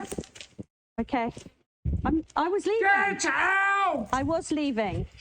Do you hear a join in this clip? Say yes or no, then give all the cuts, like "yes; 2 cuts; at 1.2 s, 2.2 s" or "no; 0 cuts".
no; 0 cuts